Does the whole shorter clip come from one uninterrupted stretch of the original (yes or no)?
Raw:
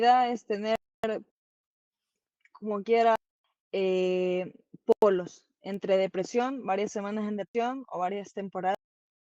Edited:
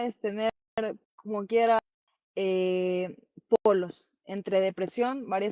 no